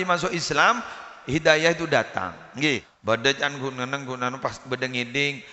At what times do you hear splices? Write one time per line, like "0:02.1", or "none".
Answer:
0:02.9